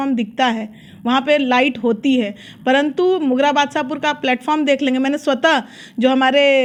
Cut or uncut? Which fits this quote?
uncut